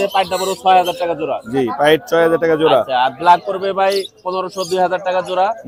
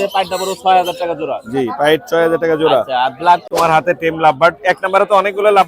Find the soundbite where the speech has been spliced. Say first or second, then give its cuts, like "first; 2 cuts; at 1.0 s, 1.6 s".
second; 1 cut; at 3.5 s